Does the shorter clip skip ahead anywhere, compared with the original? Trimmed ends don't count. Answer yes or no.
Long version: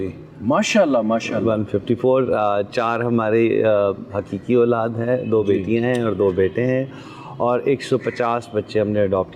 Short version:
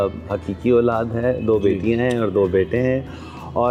no